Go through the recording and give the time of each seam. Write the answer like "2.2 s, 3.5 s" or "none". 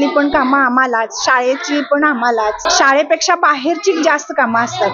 2.6 s